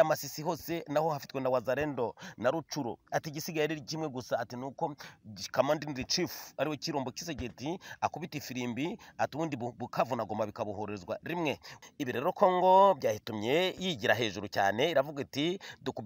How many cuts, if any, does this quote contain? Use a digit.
1